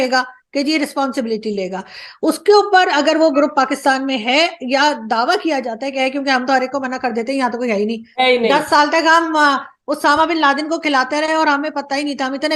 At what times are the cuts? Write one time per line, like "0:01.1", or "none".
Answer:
none